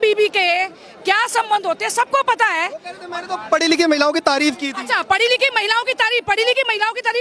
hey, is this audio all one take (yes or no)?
yes